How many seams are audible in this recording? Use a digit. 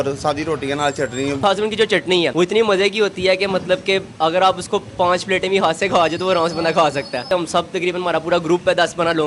3